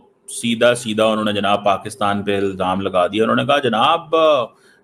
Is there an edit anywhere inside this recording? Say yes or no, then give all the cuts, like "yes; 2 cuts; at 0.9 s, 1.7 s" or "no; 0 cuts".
no; 0 cuts